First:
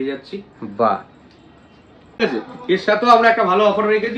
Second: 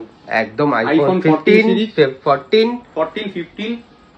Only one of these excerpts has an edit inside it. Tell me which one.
first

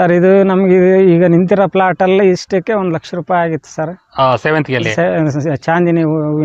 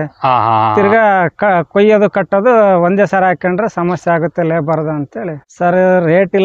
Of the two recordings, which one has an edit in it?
second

